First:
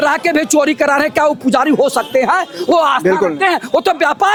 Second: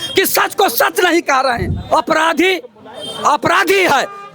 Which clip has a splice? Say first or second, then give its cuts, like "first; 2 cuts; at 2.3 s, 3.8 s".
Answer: second; 1 cut; at 1.7 s